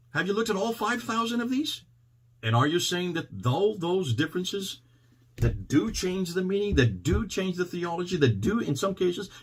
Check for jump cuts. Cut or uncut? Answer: uncut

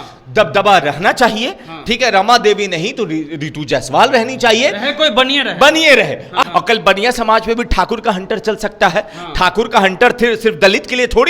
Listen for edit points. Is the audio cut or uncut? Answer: cut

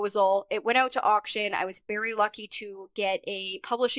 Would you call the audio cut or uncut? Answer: uncut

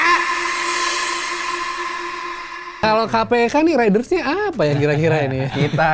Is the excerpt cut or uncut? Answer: cut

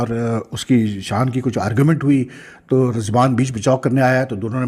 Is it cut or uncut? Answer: uncut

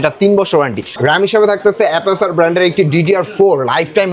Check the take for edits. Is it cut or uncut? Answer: cut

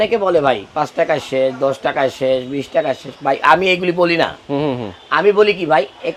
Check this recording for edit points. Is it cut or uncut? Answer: uncut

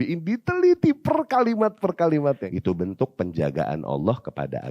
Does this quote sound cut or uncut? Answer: cut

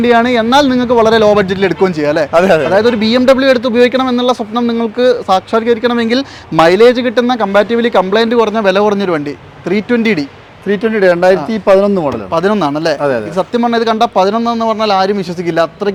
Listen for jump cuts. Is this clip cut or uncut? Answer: uncut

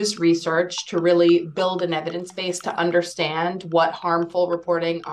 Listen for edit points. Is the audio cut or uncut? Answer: uncut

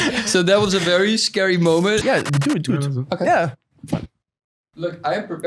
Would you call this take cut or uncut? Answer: cut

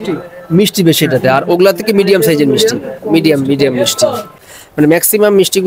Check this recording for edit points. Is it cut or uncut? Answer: cut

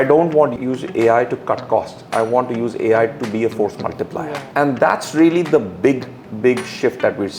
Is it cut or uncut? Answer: cut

